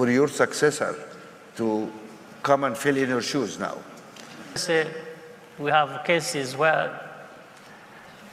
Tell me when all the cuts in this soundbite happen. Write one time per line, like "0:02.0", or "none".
0:04.6